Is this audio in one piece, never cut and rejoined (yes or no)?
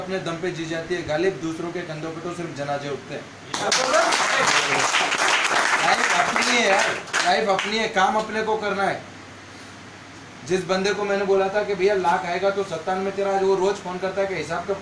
yes